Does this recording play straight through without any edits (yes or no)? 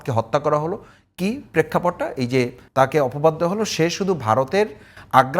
no